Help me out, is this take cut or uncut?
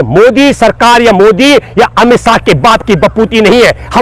uncut